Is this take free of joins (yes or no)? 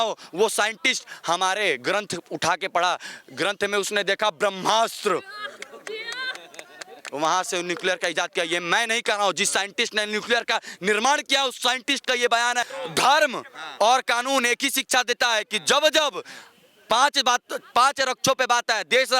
no